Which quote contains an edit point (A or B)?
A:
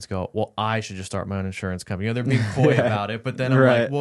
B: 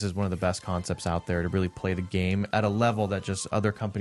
B